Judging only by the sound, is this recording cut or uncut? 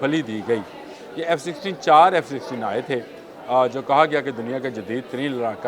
uncut